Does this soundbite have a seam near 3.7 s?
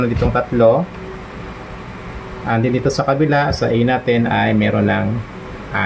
no; 0 cuts

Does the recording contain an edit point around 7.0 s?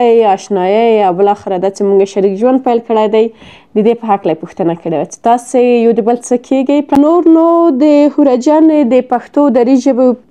yes; 1 cut; at 7.0 s

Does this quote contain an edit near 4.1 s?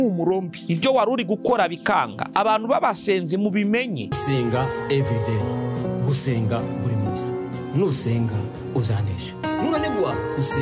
yes; 1 cut; at 4.1 s

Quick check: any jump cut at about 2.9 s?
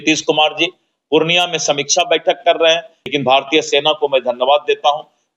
yes; 1 cut; at 2.9 s

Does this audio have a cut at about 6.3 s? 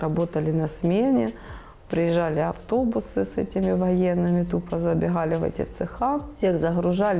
yes; 1 cut; at 6.3 s

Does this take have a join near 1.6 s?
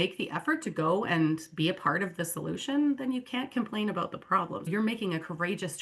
no; 1 cut; at 4.7 s

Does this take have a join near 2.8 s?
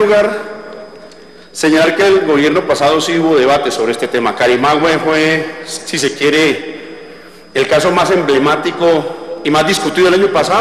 yes; 1 cut; at 2.8 s

